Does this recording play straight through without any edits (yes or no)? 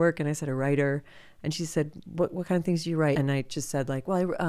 no